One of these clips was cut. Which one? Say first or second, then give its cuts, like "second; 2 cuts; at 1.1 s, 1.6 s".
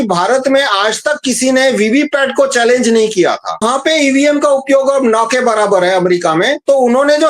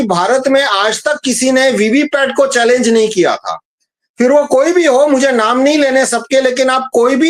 first; 1 cut; at 3.6 s